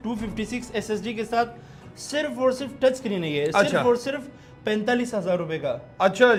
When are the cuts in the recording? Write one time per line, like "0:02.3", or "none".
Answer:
none